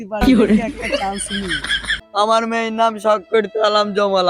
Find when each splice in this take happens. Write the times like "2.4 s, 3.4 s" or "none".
2.1 s